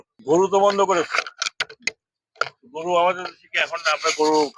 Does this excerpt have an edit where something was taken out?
no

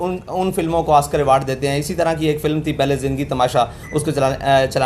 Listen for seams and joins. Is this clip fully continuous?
yes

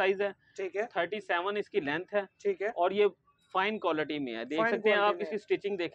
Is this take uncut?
yes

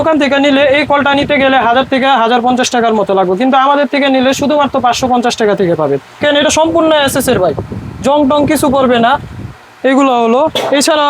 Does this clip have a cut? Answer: yes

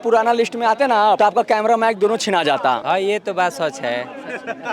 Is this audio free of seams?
no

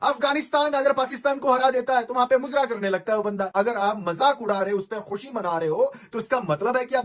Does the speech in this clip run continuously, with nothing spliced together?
no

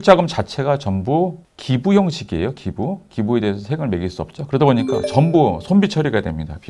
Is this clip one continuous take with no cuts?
yes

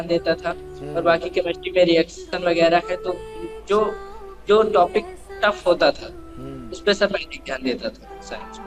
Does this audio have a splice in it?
no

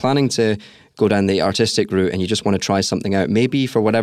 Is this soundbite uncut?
yes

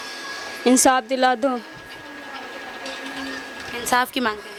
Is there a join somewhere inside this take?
no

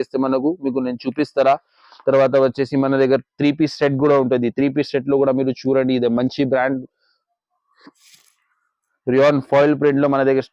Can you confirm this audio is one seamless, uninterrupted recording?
yes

